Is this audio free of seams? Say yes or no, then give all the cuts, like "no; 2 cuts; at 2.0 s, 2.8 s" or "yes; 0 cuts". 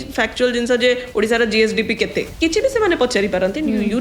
no; 1 cut; at 2.3 s